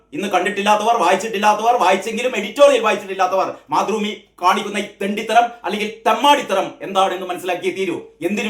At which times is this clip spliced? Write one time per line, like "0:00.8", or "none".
none